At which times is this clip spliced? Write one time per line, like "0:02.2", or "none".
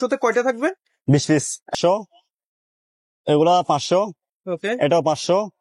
0:01.7